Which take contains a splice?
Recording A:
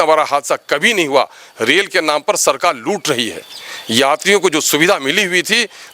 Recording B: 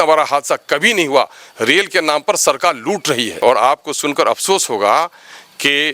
B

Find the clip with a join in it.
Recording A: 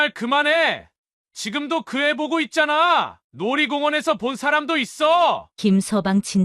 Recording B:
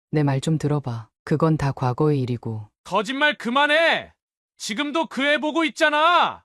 A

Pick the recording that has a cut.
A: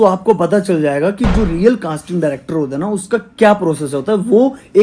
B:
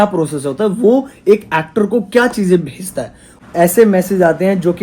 B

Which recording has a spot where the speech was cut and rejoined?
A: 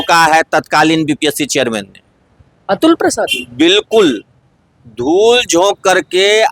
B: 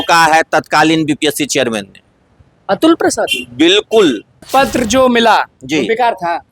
B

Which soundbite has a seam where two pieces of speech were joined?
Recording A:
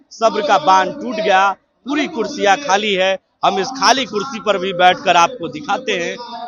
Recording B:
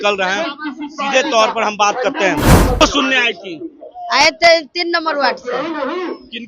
B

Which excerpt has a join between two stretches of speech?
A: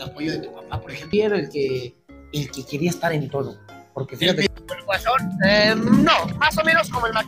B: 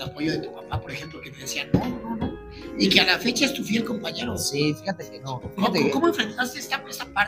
A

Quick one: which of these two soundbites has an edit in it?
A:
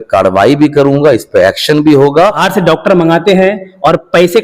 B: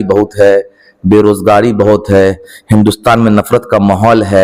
A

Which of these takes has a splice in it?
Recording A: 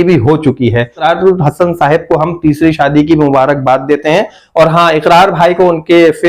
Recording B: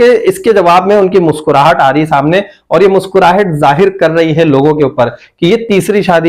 A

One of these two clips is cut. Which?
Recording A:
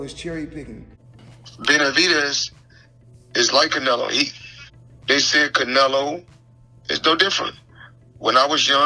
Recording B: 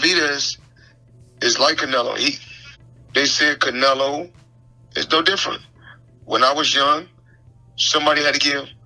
A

